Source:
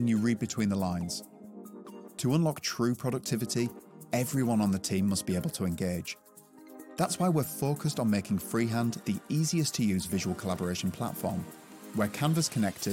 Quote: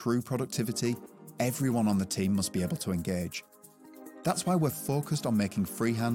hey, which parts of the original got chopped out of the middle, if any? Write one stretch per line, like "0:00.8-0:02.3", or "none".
none